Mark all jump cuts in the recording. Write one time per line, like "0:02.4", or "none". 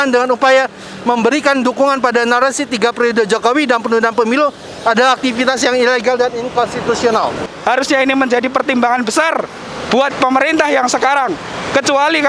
0:07.5

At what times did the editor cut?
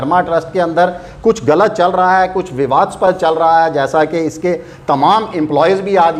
none

